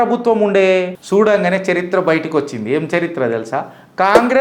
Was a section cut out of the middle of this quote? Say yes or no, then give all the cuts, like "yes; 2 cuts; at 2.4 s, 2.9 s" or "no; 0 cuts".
yes; 1 cut; at 1.0 s